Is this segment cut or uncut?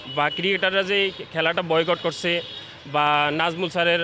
uncut